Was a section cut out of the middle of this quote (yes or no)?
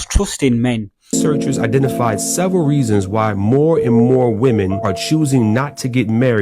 yes